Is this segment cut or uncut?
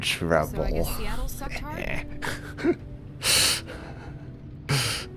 uncut